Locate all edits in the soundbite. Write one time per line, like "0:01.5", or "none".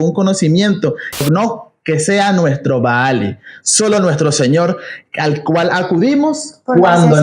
0:01.2